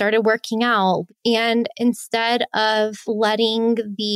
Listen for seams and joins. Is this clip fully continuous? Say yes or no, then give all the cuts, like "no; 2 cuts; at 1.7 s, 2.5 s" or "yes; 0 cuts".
no; 2 cuts; at 1.0 s, 3.0 s